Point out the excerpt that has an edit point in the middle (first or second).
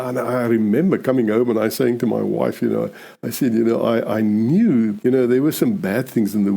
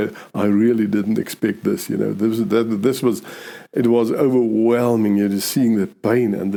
first